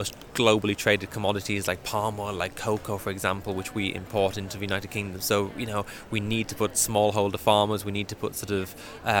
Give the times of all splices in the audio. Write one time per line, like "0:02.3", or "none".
none